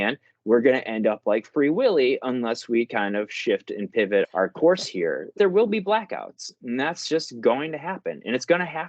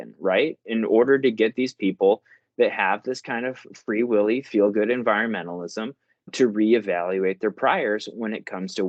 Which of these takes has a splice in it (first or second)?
first